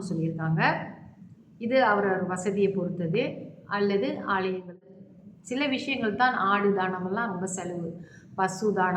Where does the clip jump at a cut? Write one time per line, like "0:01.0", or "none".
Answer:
0:04.9